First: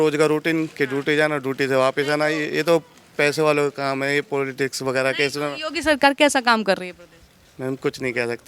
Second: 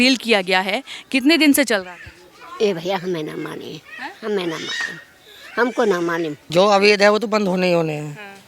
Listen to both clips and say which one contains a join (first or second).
second